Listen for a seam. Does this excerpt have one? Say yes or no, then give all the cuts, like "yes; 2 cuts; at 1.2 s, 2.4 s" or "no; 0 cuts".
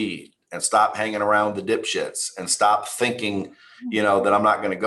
no; 0 cuts